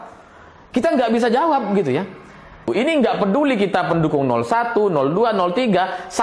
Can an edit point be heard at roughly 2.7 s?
yes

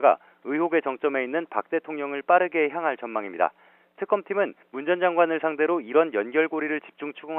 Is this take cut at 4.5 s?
no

